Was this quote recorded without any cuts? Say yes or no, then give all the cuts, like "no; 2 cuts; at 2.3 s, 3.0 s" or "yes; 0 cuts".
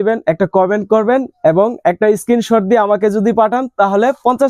yes; 0 cuts